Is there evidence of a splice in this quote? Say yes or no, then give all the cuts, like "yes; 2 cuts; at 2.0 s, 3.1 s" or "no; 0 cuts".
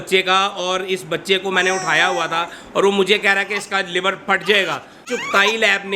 yes; 1 cut; at 5.0 s